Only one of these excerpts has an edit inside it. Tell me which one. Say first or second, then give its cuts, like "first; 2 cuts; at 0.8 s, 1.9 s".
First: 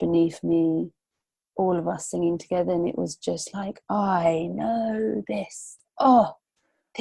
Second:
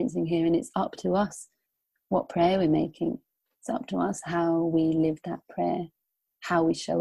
second; 1 cut; at 3.5 s